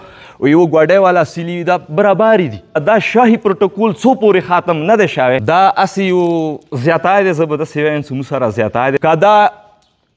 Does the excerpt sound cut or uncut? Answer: cut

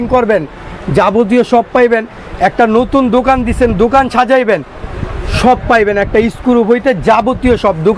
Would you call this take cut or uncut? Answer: uncut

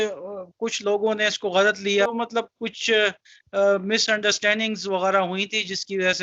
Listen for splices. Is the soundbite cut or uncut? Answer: cut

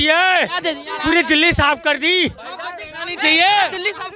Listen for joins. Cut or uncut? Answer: uncut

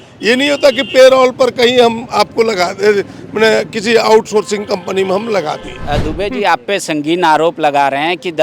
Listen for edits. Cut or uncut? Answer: cut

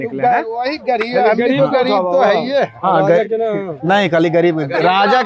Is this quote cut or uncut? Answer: uncut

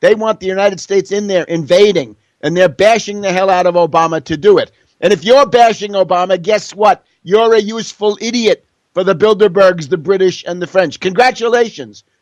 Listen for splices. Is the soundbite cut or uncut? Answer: uncut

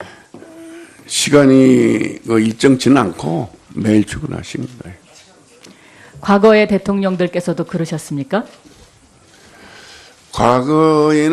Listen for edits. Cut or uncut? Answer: uncut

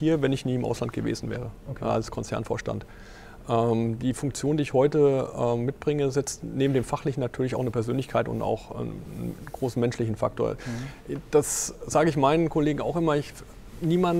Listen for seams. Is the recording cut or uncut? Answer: uncut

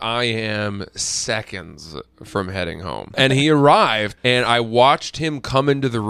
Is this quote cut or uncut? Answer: cut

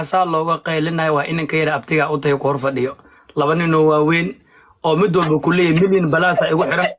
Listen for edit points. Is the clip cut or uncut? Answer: uncut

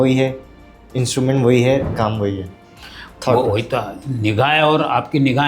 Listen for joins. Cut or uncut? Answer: uncut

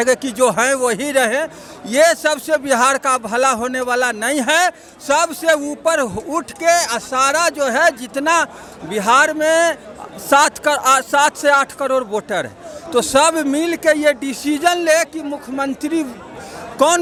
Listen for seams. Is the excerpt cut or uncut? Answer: uncut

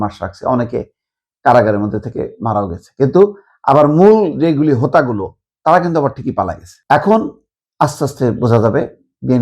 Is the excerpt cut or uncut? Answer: cut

